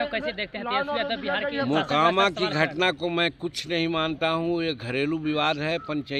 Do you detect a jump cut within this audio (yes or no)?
no